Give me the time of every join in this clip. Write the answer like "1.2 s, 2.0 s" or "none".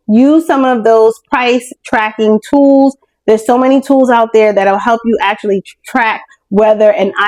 none